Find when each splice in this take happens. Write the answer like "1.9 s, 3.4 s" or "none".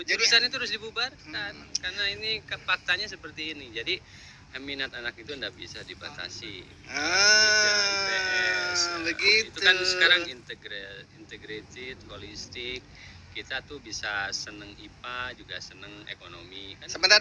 none